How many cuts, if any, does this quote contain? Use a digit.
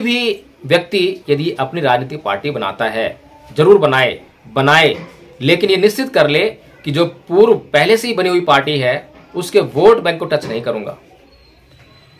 1